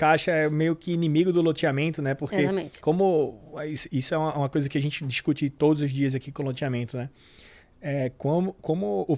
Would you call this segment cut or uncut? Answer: uncut